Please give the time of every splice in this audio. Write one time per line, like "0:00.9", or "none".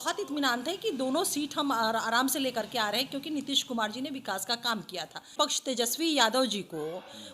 0:05.3

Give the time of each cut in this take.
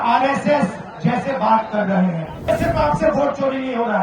0:02.5

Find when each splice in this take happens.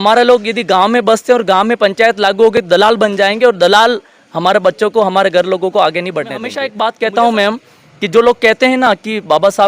0:06.6

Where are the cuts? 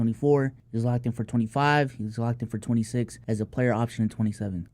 0:03.2

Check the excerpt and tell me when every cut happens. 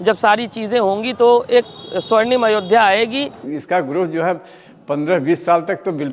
0:03.5

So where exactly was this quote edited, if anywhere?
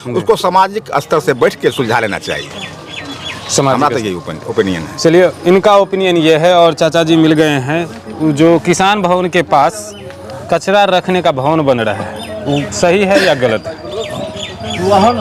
none

